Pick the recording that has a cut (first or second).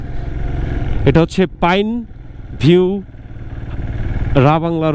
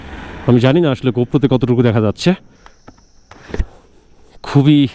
second